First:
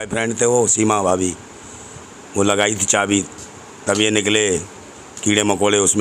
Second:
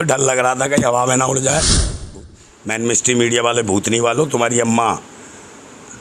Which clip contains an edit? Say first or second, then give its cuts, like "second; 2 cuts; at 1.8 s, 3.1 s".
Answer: second; 1 cut; at 2.0 s